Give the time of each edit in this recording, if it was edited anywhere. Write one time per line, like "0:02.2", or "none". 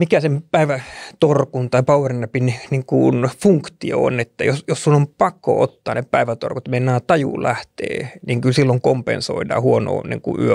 none